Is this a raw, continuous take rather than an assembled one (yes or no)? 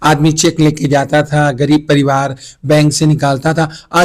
yes